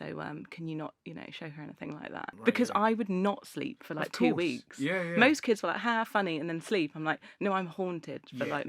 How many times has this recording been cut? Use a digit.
1